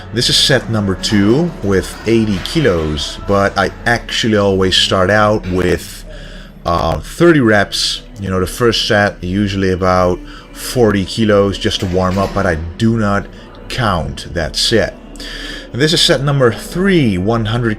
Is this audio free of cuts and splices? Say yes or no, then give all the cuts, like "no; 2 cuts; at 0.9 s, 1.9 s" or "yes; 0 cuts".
no; 1 cut; at 9.0 s